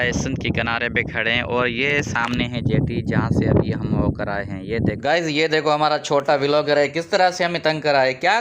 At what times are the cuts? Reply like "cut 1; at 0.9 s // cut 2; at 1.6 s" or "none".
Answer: cut 1; at 5.0 s